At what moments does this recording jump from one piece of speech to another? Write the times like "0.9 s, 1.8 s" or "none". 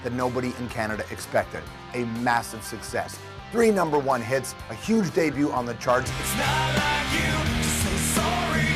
6.3 s